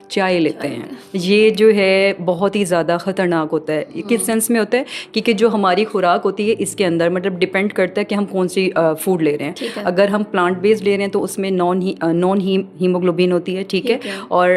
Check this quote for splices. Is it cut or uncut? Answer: uncut